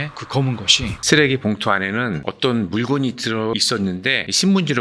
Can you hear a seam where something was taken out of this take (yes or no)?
yes